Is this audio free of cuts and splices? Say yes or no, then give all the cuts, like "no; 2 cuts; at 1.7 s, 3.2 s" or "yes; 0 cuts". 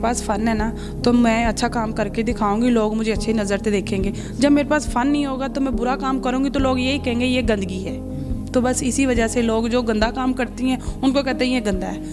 yes; 0 cuts